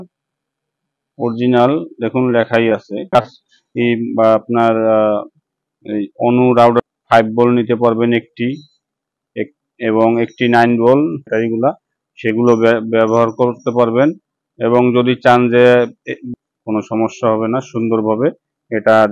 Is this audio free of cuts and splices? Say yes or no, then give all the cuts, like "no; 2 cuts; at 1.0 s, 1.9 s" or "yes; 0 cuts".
no; 4 cuts; at 3.0 s, 6.8 s, 11.3 s, 16.3 s